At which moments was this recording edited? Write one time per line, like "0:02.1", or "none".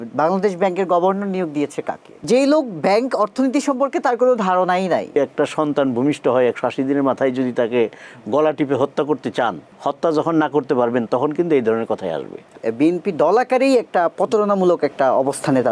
0:02.2
0:05.2
0:09.7
0:12.6